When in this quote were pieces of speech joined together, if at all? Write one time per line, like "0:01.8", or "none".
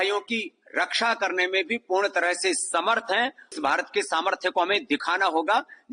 0:03.5